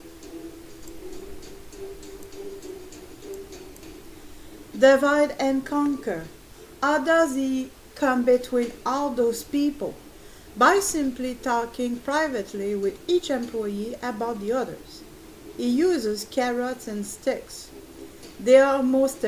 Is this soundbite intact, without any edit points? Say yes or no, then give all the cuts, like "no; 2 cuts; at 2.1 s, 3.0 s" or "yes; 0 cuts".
yes; 0 cuts